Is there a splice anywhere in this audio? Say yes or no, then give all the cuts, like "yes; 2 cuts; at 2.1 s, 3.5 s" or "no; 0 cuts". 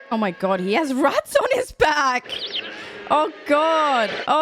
no; 0 cuts